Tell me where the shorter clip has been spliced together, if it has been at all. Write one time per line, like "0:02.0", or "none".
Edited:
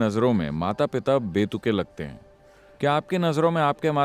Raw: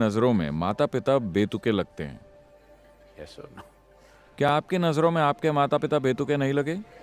0:02.9